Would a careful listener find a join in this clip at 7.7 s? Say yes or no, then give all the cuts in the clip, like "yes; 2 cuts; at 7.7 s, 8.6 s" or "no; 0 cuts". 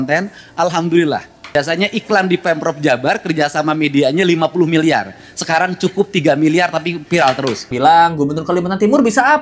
yes; 2 cuts; at 1.5 s, 7.7 s